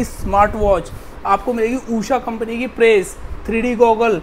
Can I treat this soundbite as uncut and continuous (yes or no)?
yes